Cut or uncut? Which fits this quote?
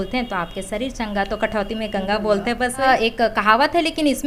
cut